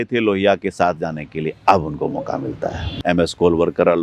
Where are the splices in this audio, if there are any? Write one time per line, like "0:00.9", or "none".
0:02.9